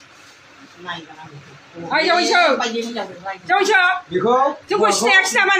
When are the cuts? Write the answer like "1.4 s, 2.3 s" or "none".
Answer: none